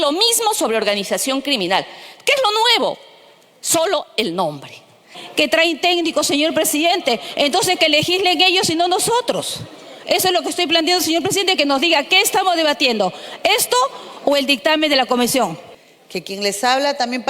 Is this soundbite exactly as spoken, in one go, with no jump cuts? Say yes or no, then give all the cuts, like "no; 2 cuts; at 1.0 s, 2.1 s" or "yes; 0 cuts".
no; 2 cuts; at 5.2 s, 15.7 s